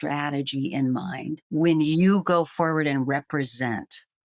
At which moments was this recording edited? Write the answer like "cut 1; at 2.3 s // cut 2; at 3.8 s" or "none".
cut 1; at 1.4 s